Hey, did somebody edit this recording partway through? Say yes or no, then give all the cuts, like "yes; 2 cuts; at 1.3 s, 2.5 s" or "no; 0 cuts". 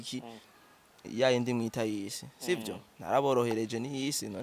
no; 0 cuts